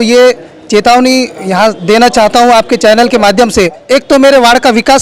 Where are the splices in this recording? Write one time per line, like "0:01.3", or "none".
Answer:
0:03.8